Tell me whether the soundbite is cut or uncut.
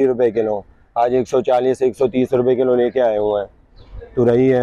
uncut